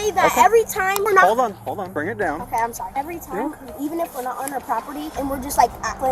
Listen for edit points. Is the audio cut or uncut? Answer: uncut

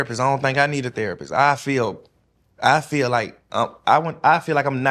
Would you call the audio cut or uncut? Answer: uncut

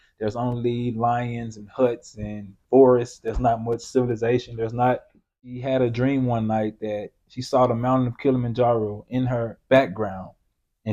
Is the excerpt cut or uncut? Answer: cut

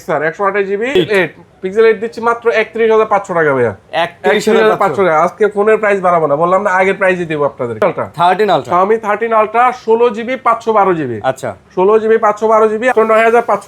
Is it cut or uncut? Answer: cut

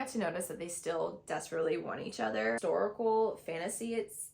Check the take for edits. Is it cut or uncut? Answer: cut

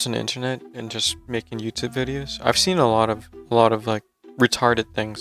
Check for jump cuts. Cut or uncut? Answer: uncut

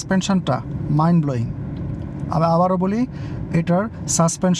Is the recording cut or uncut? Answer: uncut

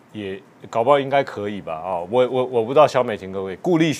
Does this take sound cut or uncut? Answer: uncut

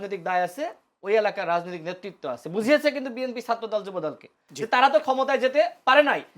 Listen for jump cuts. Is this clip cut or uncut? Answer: cut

